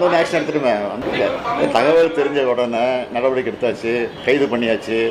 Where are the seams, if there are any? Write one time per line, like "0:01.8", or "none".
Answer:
0:01.0
0:04.1